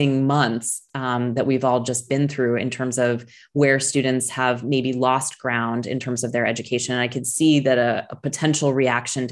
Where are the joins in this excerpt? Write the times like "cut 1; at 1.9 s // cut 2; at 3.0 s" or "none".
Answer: none